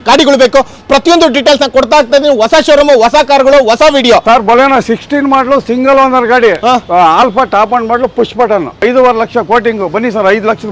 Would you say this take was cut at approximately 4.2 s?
yes; 2 cuts; at 4.2 s, 8.7 s

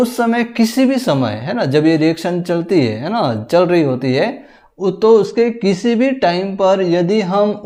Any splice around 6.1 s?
no; 0 cuts

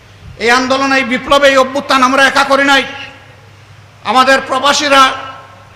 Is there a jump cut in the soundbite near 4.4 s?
no; 0 cuts

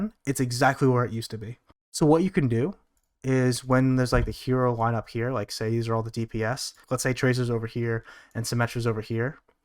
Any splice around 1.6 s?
no; 1 cut; at 6.7 s

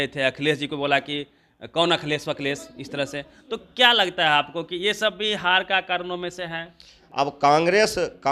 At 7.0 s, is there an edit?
yes; 1 cut; at 7.0 s

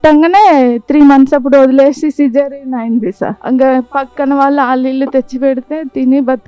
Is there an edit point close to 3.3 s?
yes; 1 cut; at 3.3 s

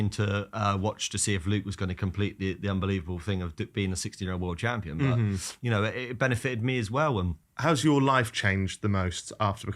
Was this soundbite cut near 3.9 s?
no; 1 cut; at 7.4 s

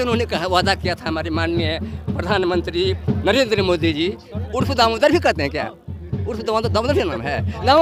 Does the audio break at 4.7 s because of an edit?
no; 0 cuts

